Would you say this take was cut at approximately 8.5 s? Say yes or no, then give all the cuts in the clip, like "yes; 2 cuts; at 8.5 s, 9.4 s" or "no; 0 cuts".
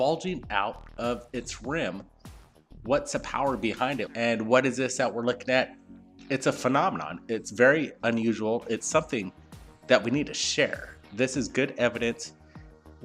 no; 0 cuts